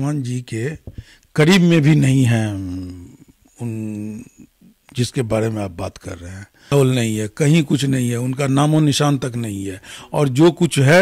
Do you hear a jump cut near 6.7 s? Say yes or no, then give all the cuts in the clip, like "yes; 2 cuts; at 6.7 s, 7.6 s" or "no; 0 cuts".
yes; 1 cut; at 6.7 s